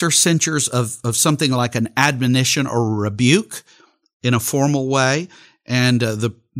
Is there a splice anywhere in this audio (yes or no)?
no